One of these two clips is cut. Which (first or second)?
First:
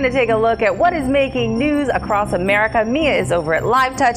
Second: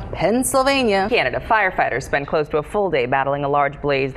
second